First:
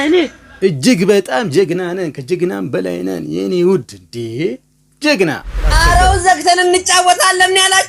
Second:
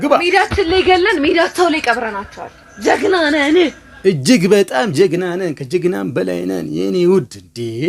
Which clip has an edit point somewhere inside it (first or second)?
first